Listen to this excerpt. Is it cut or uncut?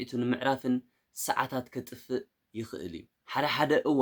cut